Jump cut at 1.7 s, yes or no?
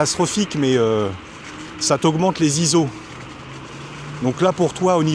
no